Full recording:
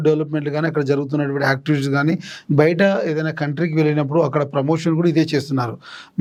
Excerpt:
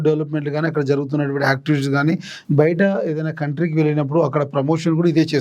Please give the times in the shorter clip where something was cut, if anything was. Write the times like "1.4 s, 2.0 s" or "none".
none